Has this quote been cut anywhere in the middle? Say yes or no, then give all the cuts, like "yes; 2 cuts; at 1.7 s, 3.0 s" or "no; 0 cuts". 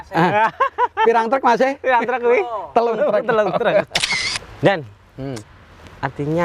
yes; 1 cut; at 4.4 s